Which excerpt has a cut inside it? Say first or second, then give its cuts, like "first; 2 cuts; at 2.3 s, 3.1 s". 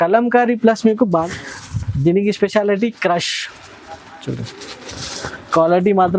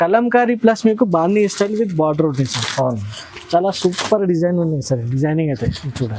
first; 1 cut; at 1.2 s